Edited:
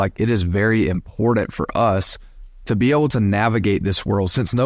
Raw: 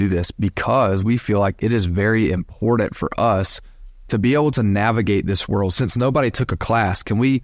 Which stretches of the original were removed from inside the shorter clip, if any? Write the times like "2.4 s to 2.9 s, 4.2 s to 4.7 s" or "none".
none